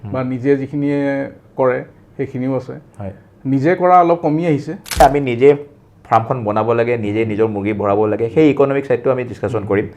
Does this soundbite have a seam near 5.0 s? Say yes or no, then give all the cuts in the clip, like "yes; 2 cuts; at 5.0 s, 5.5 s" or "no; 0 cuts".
yes; 1 cut; at 5.0 s